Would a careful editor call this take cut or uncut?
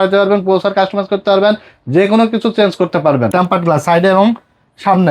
cut